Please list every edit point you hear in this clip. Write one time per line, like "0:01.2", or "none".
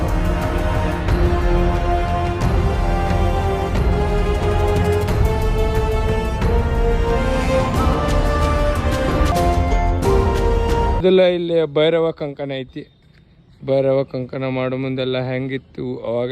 0:09.3
0:11.0